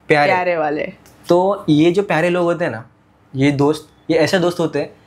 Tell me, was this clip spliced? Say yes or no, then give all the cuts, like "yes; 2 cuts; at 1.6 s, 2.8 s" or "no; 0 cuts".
no; 0 cuts